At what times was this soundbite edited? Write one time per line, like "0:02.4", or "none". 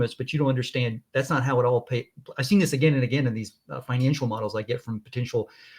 none